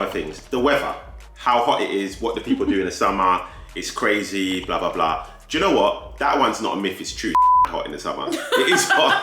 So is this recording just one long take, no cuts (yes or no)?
yes